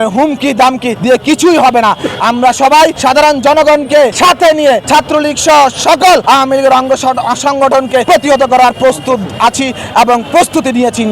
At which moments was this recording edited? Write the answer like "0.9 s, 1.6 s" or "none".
0.9 s, 3.0 s, 4.1 s, 4.8 s, 6.2 s, 8.0 s